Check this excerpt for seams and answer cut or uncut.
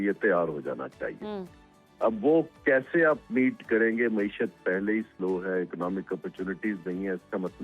uncut